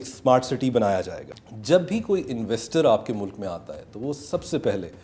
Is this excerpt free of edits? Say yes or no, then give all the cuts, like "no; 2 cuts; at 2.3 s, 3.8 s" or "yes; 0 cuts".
no; 1 cut; at 1.3 s